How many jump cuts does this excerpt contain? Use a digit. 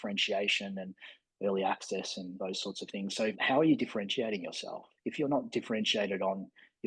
2